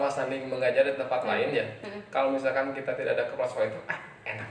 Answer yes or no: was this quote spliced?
no